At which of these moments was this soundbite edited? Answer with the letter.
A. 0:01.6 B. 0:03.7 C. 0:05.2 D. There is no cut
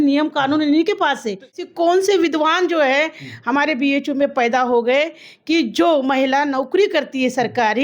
A